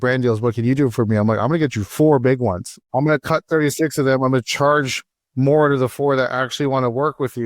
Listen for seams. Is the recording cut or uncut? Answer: cut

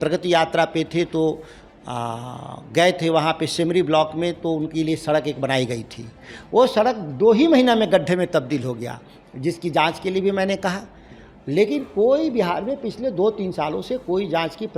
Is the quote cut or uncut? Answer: uncut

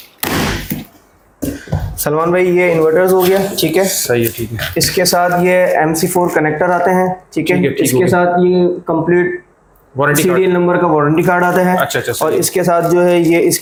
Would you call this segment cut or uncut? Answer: uncut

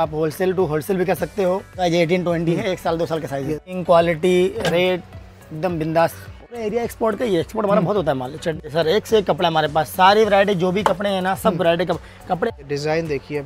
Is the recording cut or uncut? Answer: cut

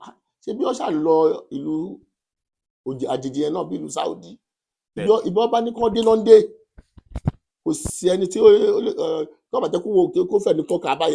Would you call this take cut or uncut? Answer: uncut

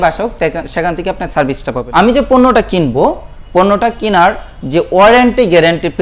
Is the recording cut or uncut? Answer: cut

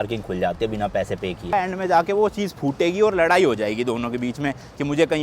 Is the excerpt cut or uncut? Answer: cut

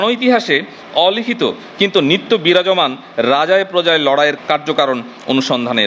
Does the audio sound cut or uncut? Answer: cut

